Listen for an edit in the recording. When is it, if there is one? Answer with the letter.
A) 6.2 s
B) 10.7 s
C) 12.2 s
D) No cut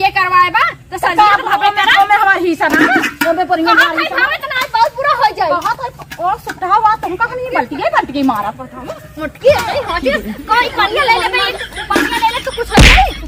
D